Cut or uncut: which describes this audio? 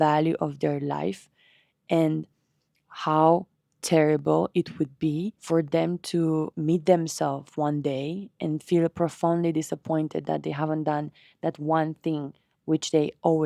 cut